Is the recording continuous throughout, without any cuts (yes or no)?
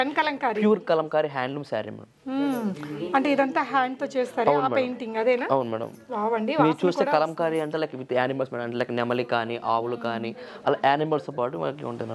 yes